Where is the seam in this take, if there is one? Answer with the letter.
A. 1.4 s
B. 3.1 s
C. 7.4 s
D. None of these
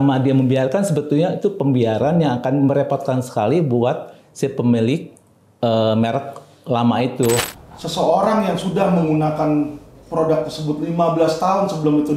C